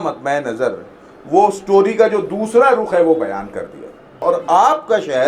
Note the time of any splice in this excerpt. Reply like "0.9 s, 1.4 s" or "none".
4.0 s